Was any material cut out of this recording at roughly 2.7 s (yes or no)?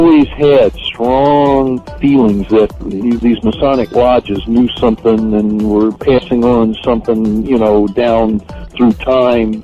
no